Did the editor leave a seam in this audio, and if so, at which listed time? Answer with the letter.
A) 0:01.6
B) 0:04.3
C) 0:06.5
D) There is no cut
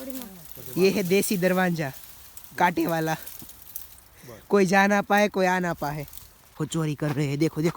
C